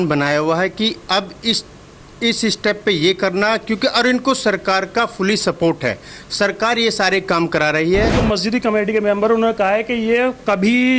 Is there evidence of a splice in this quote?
yes; 1 cut; at 8.2 s

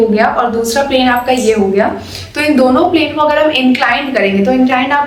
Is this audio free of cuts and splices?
yes; 0 cuts

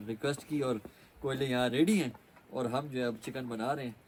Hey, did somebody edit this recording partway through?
no; 0 cuts

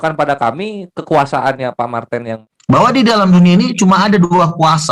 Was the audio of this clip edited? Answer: yes; 1 cut; at 2.3 s

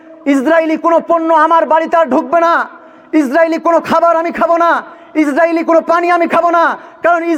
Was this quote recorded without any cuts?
yes; 0 cuts

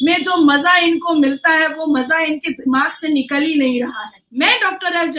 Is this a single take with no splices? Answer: no; 1 cut; at 4.1 s

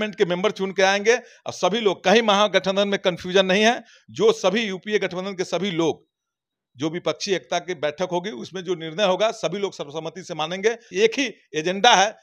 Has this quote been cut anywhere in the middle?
yes; 1 cut; at 10.9 s

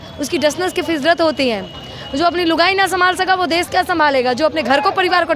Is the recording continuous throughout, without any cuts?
yes; 0 cuts

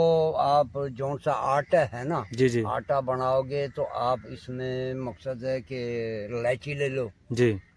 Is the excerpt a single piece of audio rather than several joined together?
yes; 0 cuts

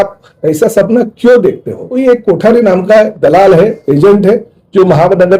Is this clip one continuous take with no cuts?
no; 1 cut; at 1.8 s

